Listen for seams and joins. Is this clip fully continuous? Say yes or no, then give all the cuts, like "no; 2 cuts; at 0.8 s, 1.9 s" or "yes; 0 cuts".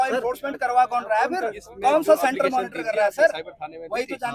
no; 1 cut; at 1.6 s